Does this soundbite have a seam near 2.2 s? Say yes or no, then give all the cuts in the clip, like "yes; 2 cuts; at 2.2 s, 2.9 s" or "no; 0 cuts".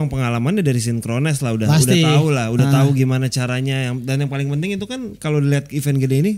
no; 0 cuts